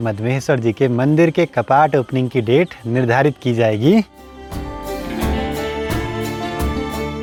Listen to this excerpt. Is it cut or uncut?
uncut